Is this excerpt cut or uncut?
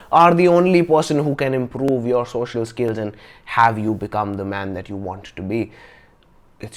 uncut